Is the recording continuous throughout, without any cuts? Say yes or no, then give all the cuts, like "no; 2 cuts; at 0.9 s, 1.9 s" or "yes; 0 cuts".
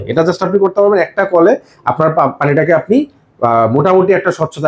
yes; 0 cuts